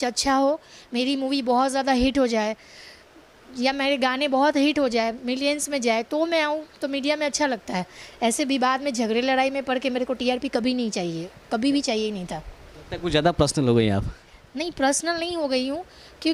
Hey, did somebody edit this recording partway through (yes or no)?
no